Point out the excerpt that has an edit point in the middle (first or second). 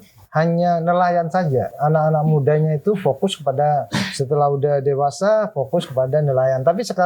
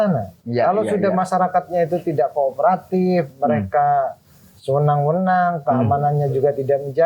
first